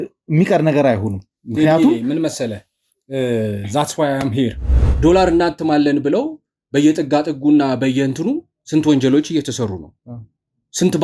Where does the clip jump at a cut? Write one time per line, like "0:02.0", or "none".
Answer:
0:05.0